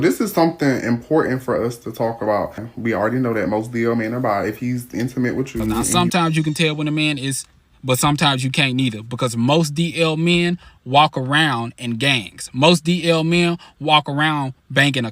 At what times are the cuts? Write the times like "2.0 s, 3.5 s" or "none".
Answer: 2.7 s, 5.9 s